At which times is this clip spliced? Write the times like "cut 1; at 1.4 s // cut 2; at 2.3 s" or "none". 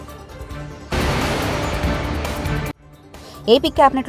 none